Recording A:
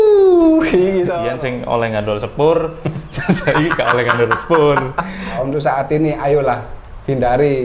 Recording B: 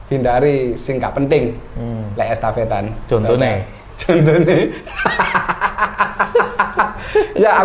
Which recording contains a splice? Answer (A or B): A